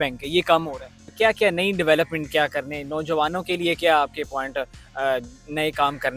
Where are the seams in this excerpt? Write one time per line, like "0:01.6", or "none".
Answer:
0:01.1